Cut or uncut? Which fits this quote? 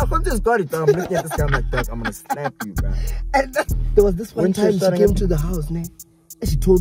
cut